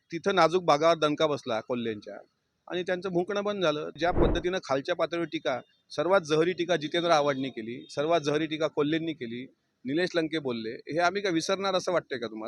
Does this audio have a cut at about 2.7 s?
no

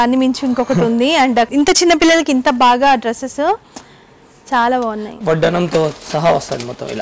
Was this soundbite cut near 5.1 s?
yes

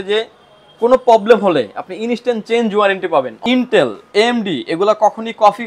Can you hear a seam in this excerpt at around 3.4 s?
yes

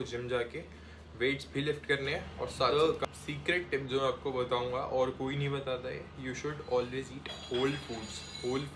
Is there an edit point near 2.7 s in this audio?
yes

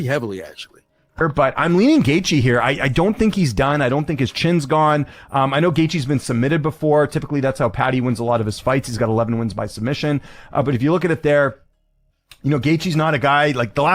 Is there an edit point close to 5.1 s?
no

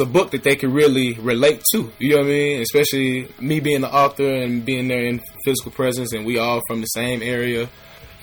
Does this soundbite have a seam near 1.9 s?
no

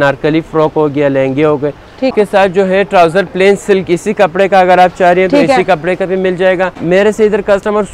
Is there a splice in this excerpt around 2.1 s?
yes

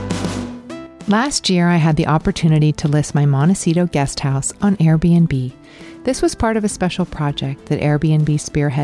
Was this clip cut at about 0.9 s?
yes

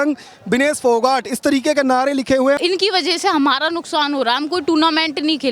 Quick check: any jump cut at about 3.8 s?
no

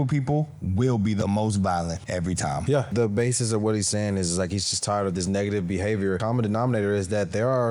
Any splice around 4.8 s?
no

